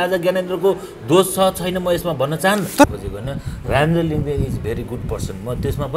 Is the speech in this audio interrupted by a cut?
yes; 1 cut; at 2.8 s

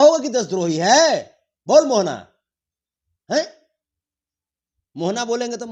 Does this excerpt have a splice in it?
no; 0 cuts

